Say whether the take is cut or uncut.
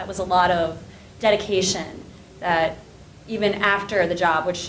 cut